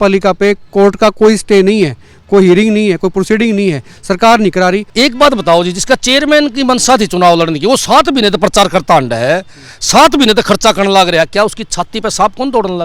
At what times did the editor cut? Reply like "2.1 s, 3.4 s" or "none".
4.9 s

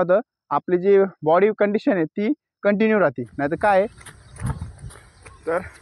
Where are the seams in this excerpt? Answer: 4.0 s

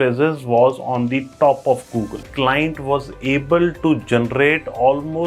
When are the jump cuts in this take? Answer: 2.3 s

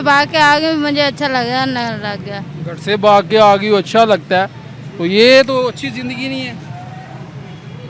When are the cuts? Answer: none

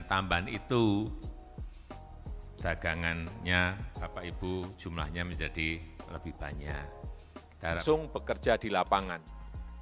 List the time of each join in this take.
7.8 s

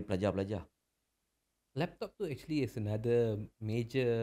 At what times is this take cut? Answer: none

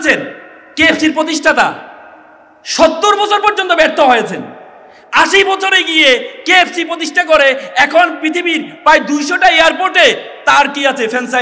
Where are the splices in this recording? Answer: none

